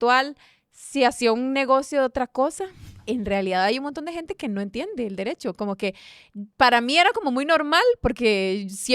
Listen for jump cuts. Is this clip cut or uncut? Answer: cut